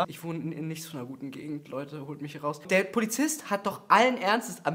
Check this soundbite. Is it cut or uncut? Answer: uncut